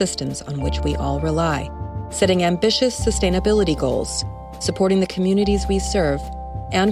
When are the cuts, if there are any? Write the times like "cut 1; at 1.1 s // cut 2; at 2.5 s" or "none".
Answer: none